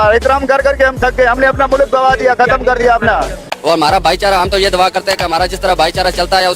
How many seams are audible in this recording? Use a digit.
1